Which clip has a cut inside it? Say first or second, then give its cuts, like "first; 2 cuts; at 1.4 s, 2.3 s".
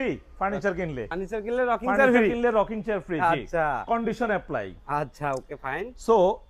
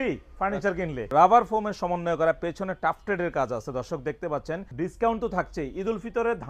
second; 2 cuts; at 1.1 s, 4.7 s